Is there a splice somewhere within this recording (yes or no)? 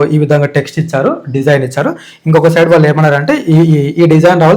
no